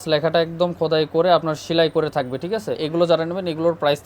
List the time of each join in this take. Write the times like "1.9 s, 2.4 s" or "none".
2.8 s